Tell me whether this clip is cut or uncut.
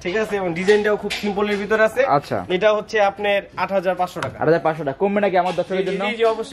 uncut